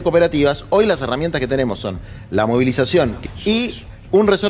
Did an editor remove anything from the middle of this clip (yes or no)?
yes